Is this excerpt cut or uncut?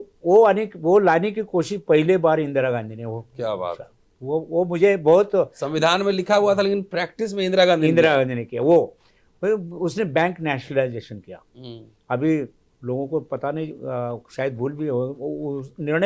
uncut